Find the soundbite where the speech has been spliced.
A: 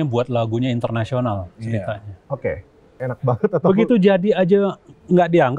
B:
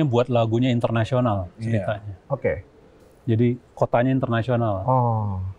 A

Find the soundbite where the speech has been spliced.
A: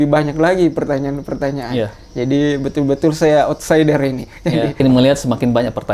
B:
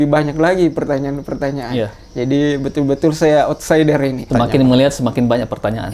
B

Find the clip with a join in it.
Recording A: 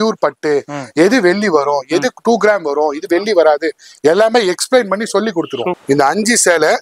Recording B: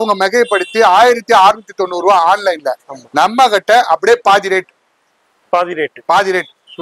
A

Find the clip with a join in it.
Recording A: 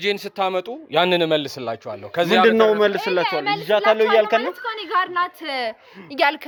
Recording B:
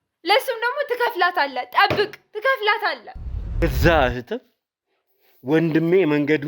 B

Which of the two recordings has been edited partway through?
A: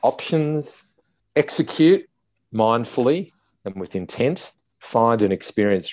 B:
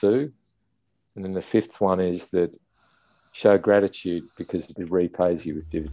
B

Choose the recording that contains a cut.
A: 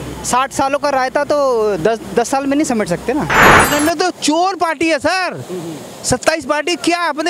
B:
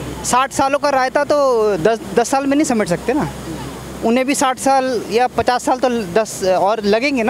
A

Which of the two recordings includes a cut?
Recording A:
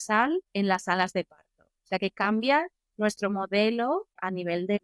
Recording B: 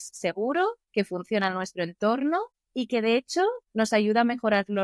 B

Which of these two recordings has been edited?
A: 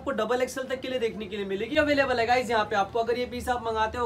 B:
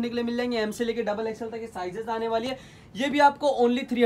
A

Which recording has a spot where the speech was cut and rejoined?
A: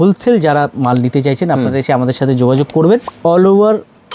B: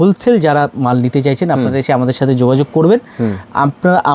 A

